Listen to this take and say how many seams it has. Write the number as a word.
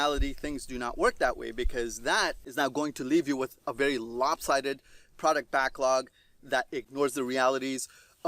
two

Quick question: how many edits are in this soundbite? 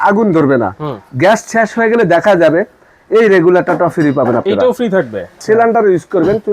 one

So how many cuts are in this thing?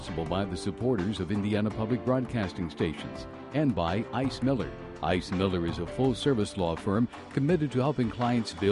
zero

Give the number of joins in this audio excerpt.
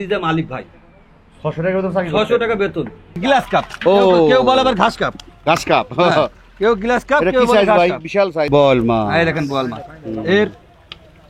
two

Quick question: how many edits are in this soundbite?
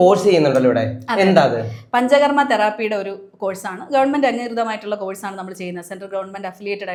zero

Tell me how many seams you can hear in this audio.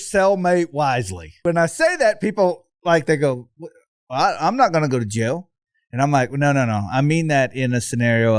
one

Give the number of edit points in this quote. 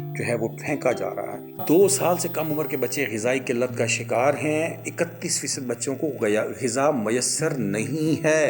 one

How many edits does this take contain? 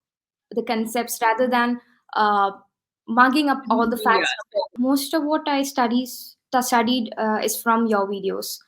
one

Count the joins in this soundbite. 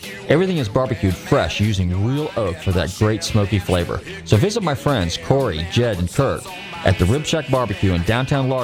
zero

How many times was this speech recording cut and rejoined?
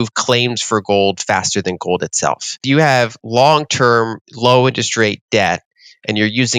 one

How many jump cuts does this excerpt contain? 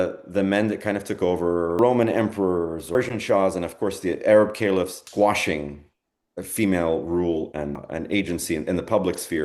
four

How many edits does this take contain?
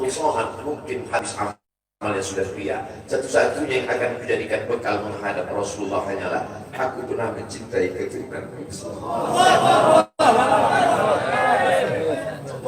one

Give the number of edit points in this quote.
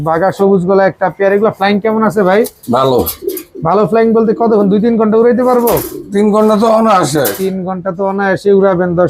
zero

